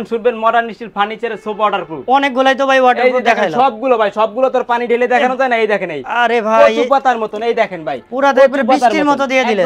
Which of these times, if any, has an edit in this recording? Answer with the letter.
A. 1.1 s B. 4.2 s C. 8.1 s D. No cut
D